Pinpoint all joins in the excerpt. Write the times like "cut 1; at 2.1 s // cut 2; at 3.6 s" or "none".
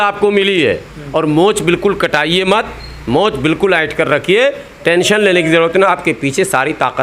none